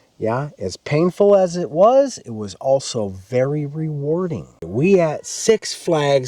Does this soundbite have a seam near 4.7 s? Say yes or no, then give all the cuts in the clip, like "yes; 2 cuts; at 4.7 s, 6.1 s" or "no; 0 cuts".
yes; 1 cut; at 4.7 s